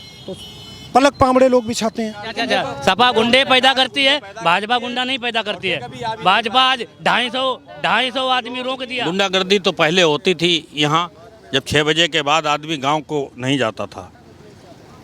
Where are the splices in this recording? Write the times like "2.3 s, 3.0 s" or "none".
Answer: 2.4 s, 8.9 s

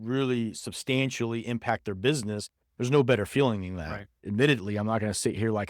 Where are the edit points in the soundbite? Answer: 4.1 s

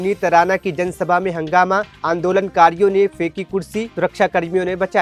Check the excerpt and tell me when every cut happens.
none

